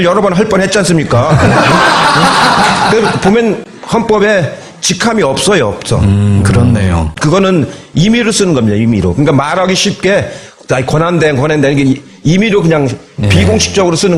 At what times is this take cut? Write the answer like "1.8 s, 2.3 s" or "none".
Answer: 2.2 s